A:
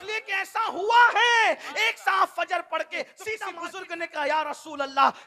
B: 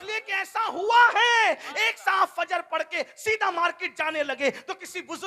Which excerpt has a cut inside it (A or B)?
A